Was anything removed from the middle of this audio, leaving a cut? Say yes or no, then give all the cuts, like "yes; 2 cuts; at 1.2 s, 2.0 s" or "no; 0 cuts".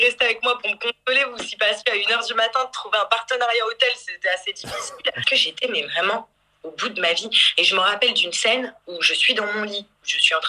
yes; 1 cut; at 5.2 s